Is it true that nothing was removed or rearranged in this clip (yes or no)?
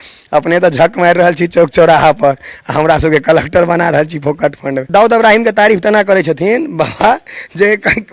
no